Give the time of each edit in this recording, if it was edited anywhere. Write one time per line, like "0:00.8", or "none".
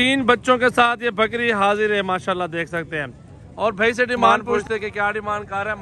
0:04.4